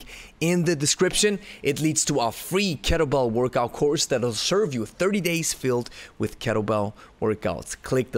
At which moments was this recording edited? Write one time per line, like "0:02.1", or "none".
none